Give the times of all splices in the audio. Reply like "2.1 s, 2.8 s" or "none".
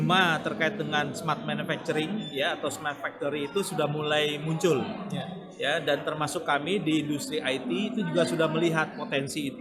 none